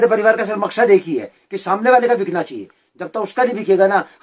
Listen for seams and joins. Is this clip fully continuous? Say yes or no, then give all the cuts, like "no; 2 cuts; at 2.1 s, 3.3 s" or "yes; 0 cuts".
yes; 0 cuts